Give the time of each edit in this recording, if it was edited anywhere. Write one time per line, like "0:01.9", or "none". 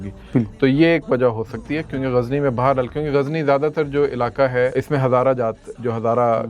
0:04.7